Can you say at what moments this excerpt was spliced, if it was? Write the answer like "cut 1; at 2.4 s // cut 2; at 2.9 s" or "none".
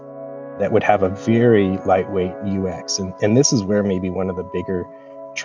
none